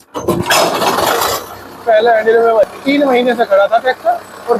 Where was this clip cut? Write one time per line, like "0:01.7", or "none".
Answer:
0:02.8